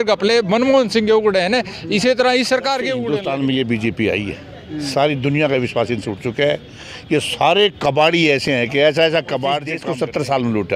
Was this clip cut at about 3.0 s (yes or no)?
yes